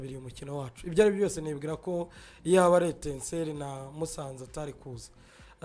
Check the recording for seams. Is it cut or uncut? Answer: uncut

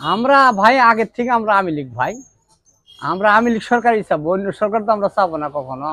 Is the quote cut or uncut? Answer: uncut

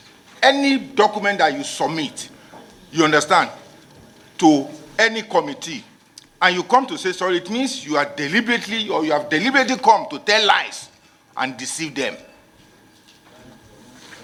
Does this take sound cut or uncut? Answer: uncut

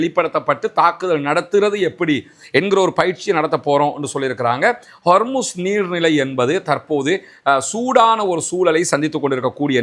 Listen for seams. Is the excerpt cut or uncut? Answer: uncut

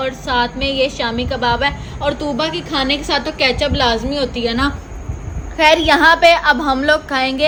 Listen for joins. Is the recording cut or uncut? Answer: uncut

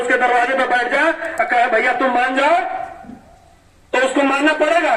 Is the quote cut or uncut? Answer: uncut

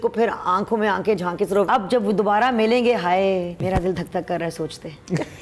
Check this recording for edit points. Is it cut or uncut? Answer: cut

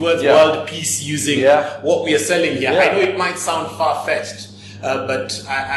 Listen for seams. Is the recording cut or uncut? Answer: uncut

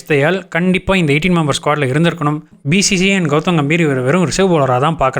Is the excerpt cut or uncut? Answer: cut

